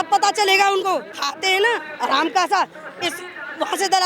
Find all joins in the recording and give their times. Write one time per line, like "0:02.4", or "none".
0:01.1